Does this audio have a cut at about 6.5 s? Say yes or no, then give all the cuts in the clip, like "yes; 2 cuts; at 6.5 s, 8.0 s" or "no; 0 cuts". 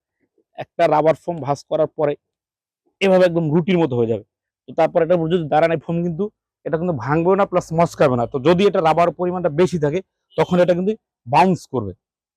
no; 0 cuts